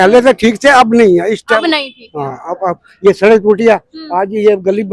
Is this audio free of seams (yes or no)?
yes